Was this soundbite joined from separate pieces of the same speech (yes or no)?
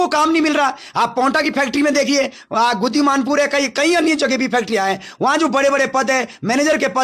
no